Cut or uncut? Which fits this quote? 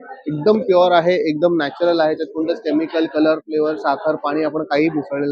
uncut